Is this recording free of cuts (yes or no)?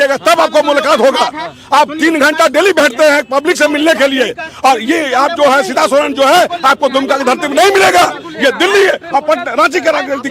yes